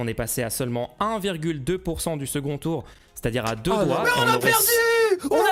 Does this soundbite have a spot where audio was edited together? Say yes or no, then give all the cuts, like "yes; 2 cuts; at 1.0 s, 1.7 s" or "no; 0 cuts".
no; 0 cuts